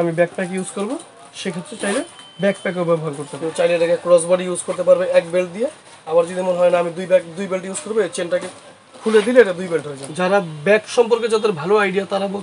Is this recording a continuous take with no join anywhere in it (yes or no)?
no